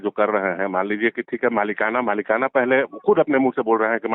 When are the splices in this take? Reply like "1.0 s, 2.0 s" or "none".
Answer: none